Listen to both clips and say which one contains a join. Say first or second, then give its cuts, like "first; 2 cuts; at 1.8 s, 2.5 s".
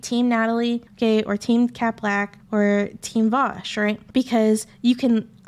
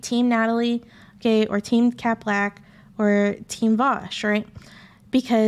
first; 3 cuts; at 0.9 s, 2.3 s, 4.0 s